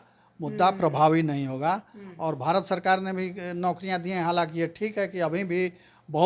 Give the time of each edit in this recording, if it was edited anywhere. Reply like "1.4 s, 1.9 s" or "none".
none